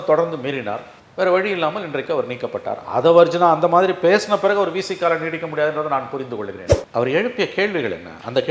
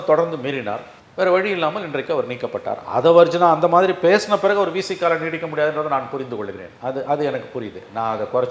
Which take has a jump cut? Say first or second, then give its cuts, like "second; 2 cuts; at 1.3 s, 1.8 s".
first; 1 cut; at 6.7 s